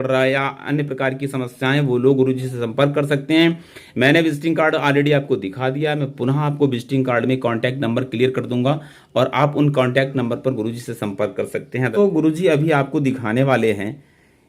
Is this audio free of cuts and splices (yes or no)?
no